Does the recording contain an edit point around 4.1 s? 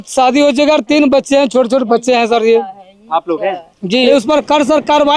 yes; 1 cut; at 4.1 s

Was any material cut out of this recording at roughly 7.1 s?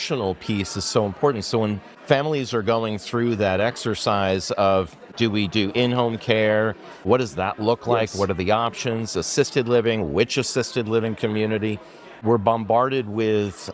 yes; 4 cuts; at 1.9 s, 5.0 s, 7.1 s, 12.2 s

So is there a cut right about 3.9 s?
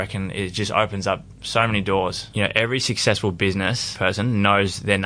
yes; 2 cuts; at 2.2 s, 3.9 s

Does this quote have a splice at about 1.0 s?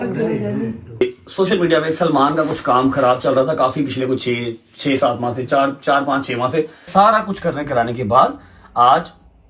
yes; 2 cuts; at 1.0 s, 6.9 s

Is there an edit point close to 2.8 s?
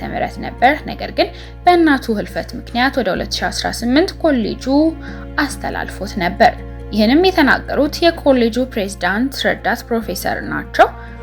no; 0 cuts

